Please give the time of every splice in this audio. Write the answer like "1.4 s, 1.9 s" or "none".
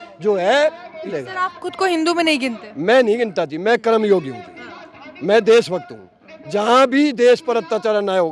1.1 s